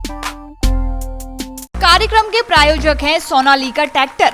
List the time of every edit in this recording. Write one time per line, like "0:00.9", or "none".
0:01.7